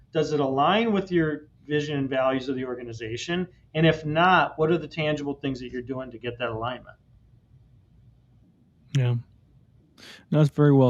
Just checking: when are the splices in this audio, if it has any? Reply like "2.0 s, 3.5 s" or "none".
none